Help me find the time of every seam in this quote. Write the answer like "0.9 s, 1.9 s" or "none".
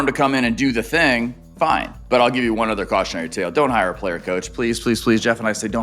1.9 s

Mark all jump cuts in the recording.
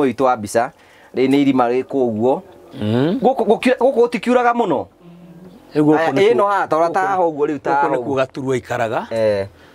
none

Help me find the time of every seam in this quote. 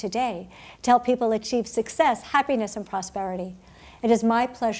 1.2 s

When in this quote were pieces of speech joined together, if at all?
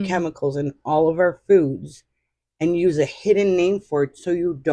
none

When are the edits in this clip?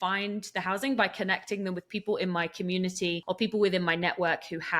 3.2 s

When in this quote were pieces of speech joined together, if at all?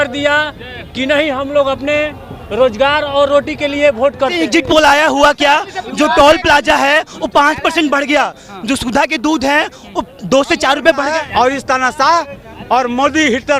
4.4 s, 11.1 s

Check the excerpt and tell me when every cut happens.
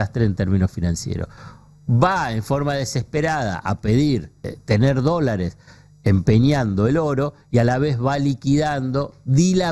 4.5 s

